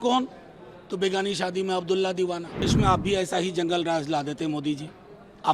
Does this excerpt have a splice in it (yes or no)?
yes